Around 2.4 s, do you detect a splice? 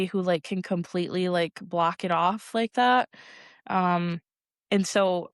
no; 0 cuts

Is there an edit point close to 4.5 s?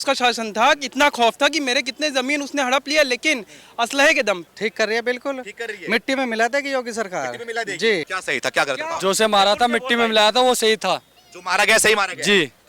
yes; 2 cuts; at 4.5 s, 8.1 s

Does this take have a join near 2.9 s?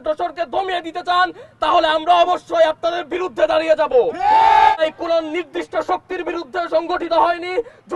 no; 1 cut; at 4.7 s

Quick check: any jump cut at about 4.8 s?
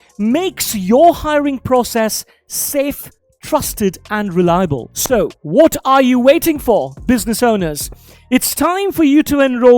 yes; 1 cut; at 4.8 s

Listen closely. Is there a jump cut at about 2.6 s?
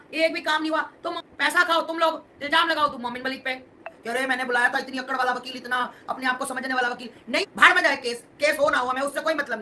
no; 3 cuts; at 1.1 s, 3.9 s, 7.4 s

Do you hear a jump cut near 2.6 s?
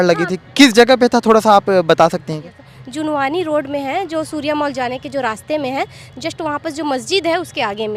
no; 0 cuts

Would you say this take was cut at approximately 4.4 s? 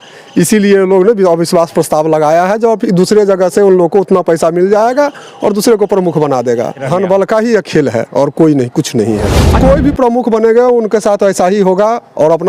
no; 2 cuts; at 6.8 s, 9.6 s

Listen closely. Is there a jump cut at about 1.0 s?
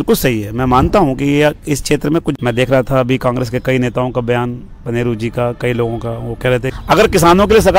no; 2 cuts; at 2.3 s, 6.7 s

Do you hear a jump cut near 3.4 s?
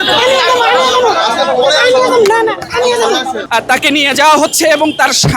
yes; 1 cut; at 3.4 s

